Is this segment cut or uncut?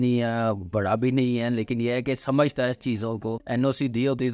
cut